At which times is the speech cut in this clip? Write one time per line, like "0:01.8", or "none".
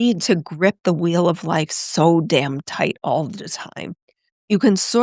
none